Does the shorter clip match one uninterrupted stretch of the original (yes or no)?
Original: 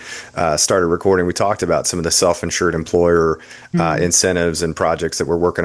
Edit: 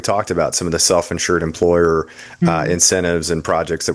yes